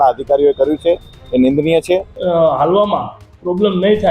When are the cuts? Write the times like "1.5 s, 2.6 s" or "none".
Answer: 2.1 s